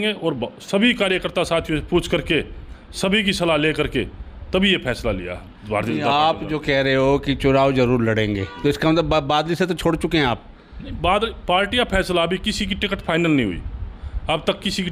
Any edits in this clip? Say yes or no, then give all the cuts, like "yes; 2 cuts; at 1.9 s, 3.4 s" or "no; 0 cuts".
no; 0 cuts